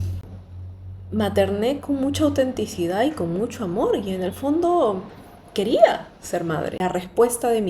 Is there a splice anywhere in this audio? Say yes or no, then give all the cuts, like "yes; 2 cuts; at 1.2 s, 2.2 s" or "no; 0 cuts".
yes; 1 cut; at 6.7 s